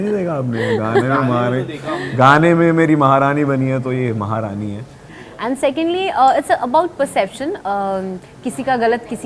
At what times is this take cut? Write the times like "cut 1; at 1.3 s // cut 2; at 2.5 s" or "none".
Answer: cut 1; at 5.1 s